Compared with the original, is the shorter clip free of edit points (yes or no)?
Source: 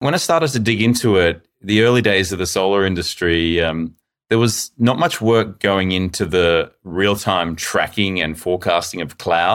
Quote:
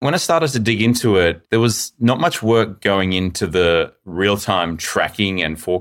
no